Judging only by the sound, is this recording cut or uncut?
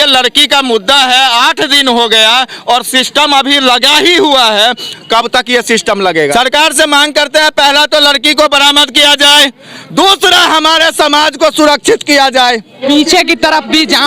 cut